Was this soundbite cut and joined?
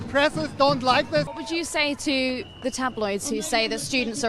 yes; 1 cut; at 1.3 s

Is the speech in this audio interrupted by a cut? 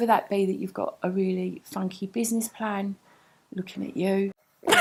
no; 0 cuts

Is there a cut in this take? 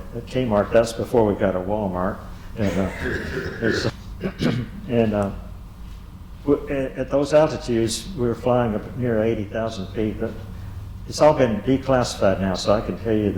yes; 1 cut; at 3.9 s

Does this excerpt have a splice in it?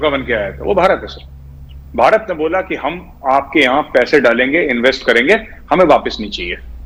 no; 0 cuts

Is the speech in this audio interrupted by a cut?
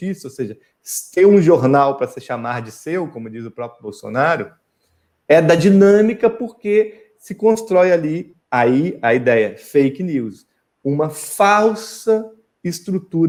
no; 0 cuts

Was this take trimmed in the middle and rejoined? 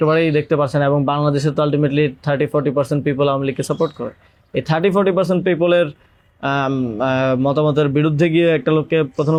no; 0 cuts

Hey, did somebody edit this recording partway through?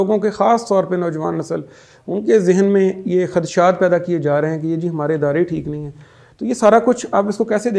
no; 0 cuts

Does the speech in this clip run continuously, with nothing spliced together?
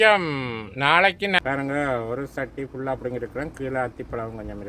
no; 1 cut; at 1.4 s

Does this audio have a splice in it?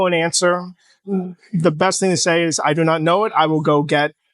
no; 0 cuts

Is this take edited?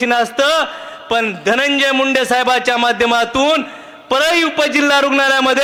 no; 0 cuts

